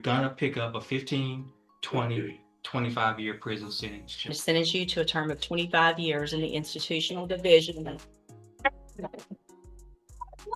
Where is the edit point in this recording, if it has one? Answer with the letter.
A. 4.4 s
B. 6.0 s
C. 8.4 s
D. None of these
A